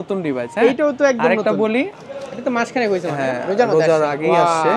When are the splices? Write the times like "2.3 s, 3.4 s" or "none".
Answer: 2.0 s